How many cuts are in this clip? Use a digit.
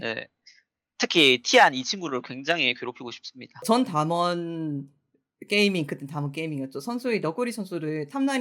1